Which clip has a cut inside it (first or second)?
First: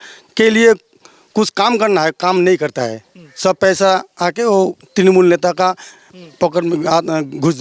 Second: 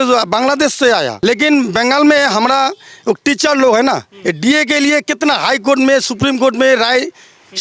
second